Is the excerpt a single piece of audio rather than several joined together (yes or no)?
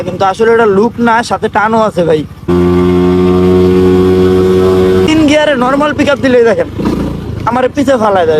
no